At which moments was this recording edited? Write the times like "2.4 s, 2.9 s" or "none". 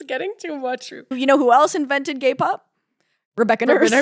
1.2 s